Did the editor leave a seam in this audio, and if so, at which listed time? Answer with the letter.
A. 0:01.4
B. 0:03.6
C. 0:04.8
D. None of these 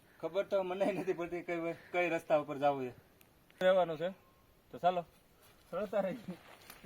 B